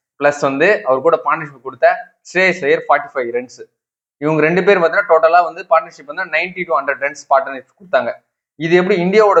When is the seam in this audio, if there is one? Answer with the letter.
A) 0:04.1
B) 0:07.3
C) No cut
C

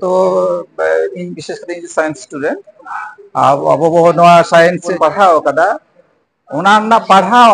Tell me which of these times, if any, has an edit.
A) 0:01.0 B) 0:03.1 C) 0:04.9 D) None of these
C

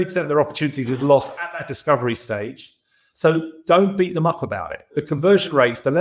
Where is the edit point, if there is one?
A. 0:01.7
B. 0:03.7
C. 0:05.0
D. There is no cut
C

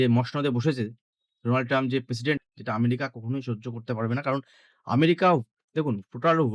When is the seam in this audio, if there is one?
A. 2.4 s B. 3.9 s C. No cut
A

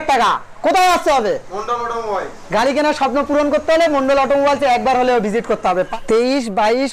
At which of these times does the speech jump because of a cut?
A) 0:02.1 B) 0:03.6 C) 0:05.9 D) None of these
C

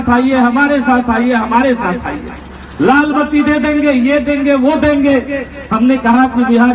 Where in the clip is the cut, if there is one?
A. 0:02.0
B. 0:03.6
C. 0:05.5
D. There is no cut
D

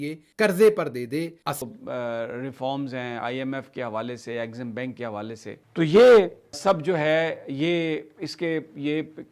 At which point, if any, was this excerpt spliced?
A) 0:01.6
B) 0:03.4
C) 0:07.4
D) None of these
A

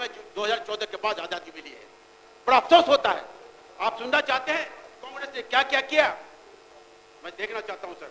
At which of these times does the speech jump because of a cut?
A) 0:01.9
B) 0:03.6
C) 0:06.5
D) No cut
D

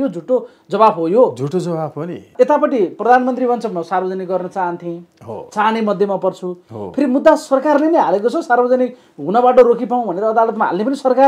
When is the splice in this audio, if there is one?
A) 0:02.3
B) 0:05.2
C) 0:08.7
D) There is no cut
A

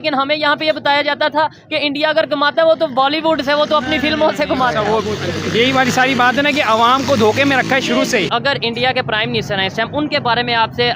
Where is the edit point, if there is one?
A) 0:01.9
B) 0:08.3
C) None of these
B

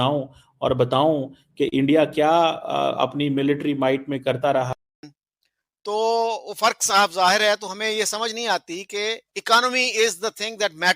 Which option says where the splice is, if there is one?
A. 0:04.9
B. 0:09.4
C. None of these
A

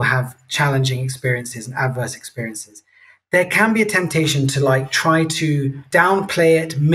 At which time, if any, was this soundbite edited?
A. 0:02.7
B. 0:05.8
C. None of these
B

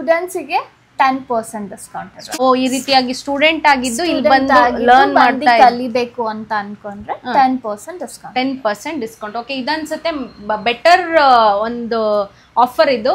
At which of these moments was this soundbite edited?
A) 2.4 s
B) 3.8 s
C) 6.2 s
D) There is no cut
A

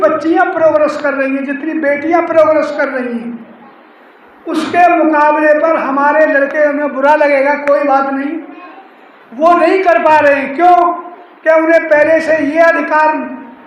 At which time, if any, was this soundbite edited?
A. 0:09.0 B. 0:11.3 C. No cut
C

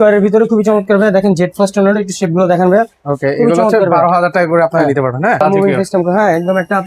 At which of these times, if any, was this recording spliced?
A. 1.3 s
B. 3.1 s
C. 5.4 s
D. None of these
C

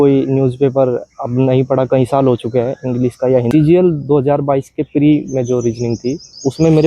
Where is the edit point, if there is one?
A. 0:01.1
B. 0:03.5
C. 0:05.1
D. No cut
B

